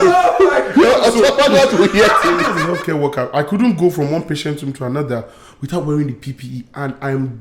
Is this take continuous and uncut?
no; 1 cut; at 2.6 s

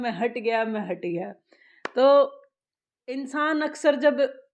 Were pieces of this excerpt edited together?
no; 0 cuts

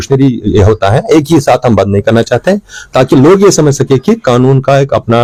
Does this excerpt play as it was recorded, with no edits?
yes; 0 cuts

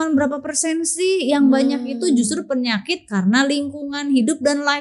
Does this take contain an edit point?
no; 0 cuts

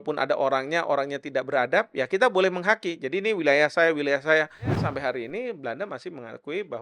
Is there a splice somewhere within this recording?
yes; 1 cut; at 4.9 s

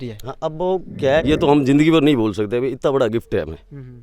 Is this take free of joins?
no; 1 cut; at 1.2 s

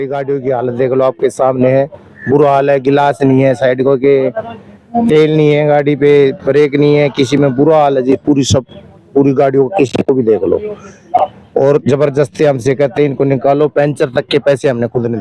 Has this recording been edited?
no; 0 cuts

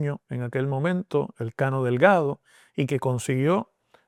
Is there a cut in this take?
no; 0 cuts

